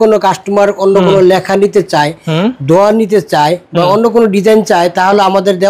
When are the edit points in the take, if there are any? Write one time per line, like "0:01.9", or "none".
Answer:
none